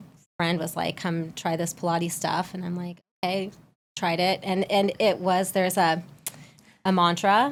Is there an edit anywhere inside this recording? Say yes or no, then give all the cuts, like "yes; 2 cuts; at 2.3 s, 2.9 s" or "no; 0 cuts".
no; 0 cuts